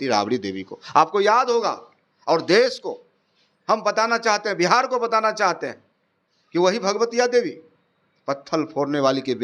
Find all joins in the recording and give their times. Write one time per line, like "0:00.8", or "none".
none